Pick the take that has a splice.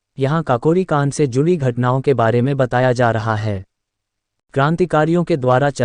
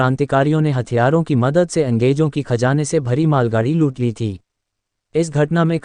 first; 1 cut; at 4.0 s

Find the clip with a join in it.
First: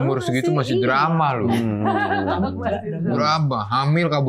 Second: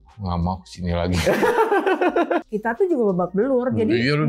second; 1 cut; at 2.4 s

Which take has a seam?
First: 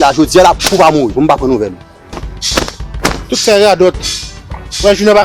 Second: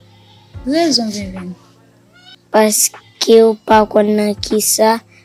first; 1 cut; at 2.3 s

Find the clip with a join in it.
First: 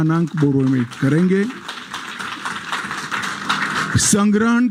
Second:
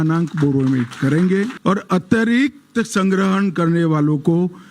second; 1 cut; at 1.6 s

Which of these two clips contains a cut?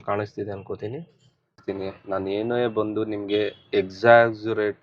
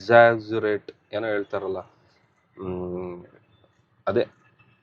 first; 1 cut; at 1.6 s

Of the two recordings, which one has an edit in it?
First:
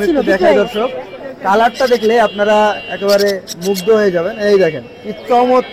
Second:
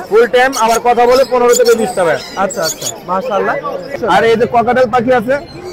second; 1 cut; at 4.0 s

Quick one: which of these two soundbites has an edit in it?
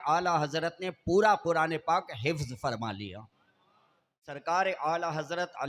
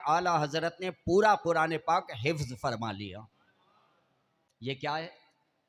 first; 1 cut; at 4.4 s

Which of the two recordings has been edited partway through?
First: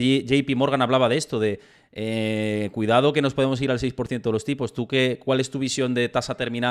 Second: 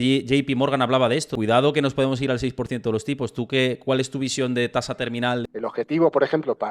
second; 2 cuts; at 1.3 s, 5.4 s

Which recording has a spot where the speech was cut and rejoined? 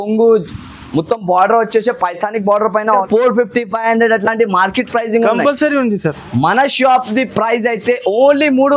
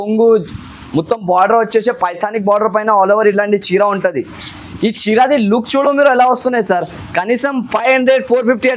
first; 1 cut; at 3.0 s

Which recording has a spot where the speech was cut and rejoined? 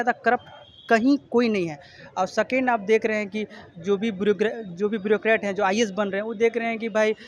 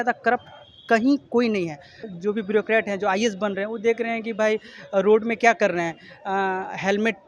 second; 1 cut; at 2.1 s

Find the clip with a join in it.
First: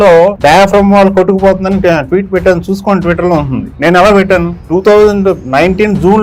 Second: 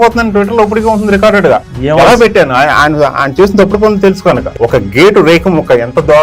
second; 1 cut; at 4.5 s

